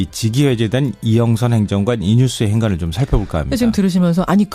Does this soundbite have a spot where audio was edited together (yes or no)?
no